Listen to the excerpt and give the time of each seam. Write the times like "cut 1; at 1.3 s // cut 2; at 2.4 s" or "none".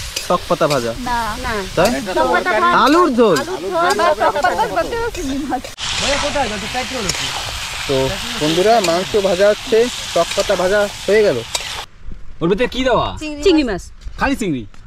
cut 1; at 5.8 s // cut 2; at 11.7 s